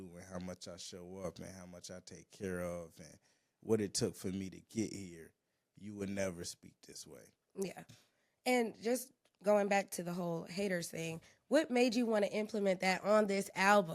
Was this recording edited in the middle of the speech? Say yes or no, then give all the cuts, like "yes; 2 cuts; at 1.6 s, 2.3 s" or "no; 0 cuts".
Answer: no; 0 cuts